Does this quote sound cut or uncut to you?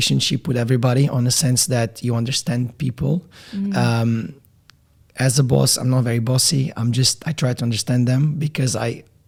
uncut